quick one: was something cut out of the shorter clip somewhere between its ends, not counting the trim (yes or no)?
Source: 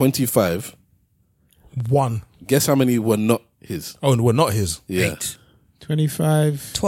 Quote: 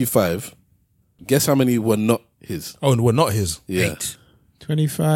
yes